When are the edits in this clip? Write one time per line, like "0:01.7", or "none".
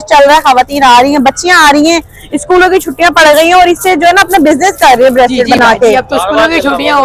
none